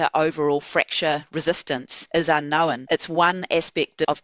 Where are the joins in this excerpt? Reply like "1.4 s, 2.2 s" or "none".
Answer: 1.9 s, 2.8 s